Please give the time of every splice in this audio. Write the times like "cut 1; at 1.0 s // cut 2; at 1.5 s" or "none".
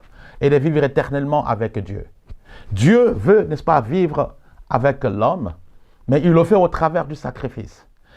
none